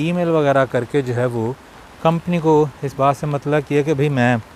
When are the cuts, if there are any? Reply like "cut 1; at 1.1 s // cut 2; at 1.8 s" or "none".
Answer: none